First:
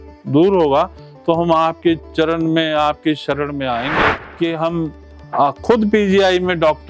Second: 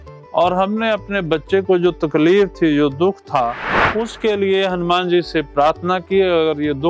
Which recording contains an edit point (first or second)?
first